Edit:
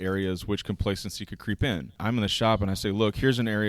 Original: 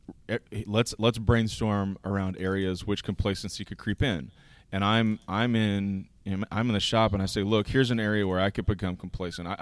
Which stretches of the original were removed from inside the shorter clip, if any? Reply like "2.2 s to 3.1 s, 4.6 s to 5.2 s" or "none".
4.3 s to 6.5 s